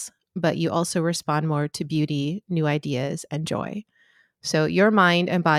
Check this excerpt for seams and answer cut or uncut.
uncut